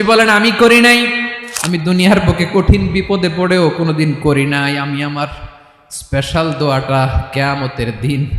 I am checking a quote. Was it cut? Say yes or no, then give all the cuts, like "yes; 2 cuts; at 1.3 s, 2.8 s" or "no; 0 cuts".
yes; 1 cut; at 1.4 s